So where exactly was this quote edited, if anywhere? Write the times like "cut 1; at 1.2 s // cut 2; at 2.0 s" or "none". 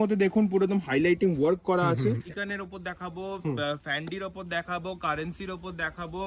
cut 1; at 2.2 s